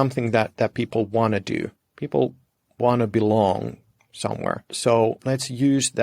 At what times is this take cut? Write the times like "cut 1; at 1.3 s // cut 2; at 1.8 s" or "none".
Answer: cut 1; at 4.7 s // cut 2; at 5.2 s